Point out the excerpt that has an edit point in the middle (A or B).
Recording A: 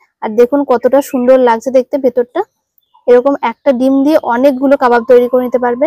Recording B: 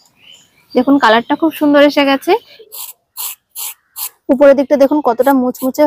B